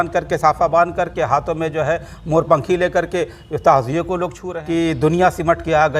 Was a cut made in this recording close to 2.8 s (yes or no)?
no